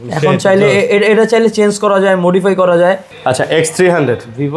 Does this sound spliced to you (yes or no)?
yes